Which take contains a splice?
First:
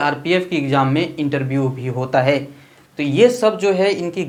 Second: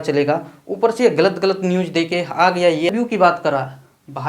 second; 1 cut; at 2.9 s

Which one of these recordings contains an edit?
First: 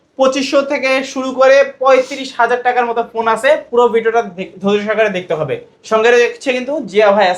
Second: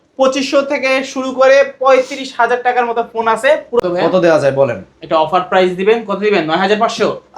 second; 1 cut; at 3.8 s

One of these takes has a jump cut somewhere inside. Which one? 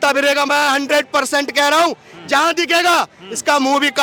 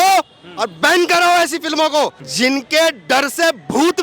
second; 1 cut; at 2.2 s

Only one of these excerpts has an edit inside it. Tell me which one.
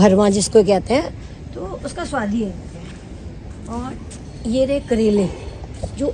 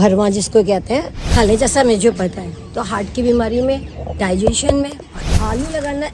second; 2 cuts; at 1.2 s, 5.2 s

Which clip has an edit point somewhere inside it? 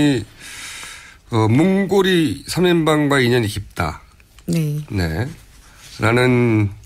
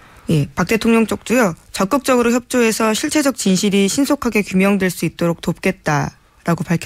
first; 1 cut; at 1.1 s

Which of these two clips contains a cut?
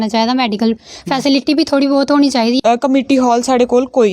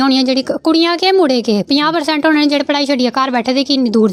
first; 1 cut; at 2.6 s

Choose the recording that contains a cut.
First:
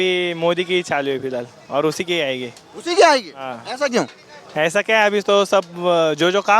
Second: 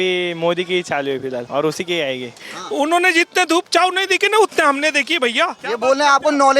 second; 3 cuts; at 1.5 s, 2.5 s, 5.6 s

